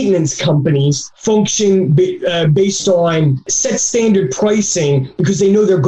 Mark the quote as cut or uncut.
cut